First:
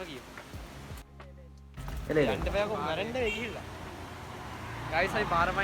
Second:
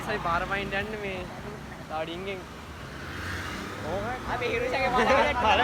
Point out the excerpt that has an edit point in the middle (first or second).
first